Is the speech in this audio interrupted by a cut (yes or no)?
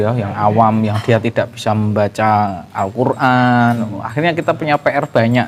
no